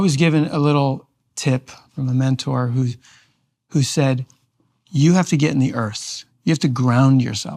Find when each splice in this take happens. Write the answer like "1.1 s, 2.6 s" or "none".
1.9 s